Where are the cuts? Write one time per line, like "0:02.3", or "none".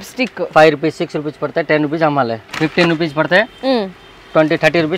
0:02.4